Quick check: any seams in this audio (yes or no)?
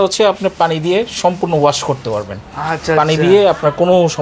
no